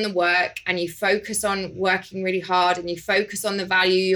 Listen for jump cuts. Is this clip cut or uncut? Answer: uncut